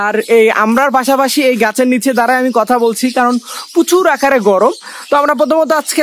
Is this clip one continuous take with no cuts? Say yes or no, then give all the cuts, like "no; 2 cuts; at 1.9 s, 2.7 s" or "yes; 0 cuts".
yes; 0 cuts